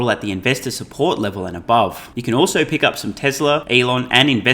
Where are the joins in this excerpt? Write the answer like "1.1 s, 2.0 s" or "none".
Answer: 2.1 s, 3.6 s